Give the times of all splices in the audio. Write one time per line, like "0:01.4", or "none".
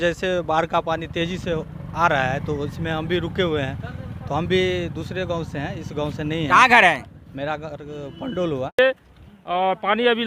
0:08.8